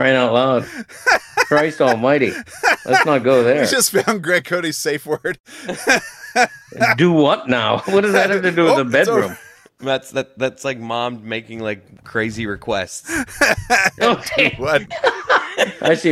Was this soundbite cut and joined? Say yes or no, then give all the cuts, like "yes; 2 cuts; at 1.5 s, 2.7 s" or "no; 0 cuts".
yes; 1 cut; at 14.9 s